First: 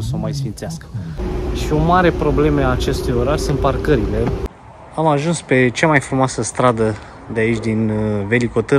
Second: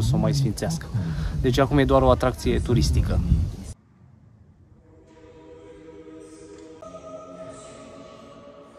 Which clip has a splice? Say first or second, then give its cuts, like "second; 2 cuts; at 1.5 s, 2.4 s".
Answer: first; 2 cuts; at 1.3 s, 4.5 s